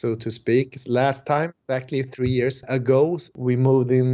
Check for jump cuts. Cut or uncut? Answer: cut